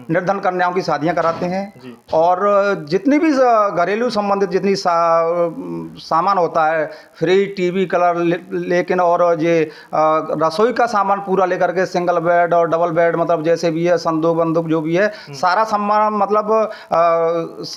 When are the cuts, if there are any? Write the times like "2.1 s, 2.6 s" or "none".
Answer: none